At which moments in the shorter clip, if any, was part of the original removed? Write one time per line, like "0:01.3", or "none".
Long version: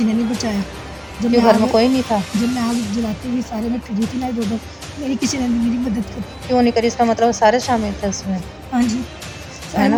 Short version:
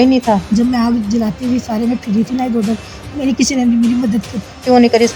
none